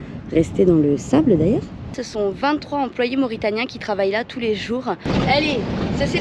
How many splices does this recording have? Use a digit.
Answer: 2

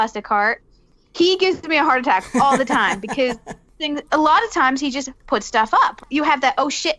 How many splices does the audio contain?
3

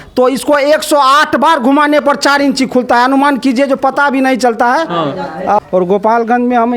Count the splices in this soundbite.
1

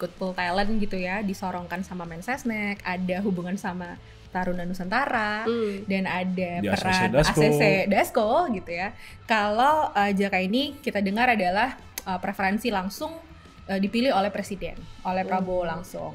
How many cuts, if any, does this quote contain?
0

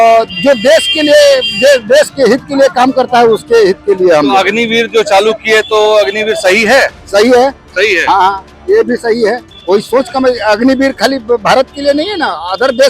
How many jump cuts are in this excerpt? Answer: 1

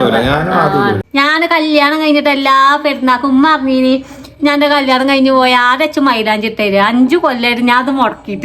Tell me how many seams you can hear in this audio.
1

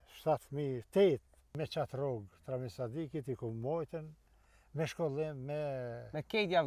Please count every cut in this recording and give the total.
1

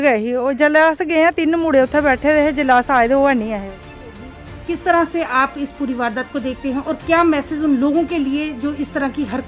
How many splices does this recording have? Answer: 1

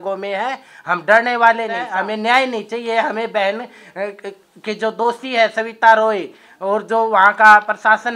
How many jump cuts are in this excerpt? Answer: 1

